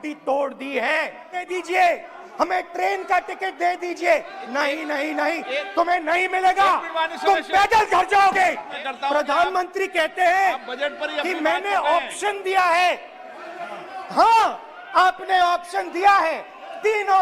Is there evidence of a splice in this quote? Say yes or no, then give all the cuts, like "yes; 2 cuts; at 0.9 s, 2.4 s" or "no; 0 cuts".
yes; 2 cuts; at 1.4 s, 8.7 s